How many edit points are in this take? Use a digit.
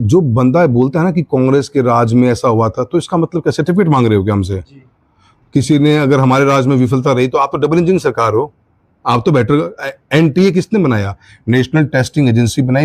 0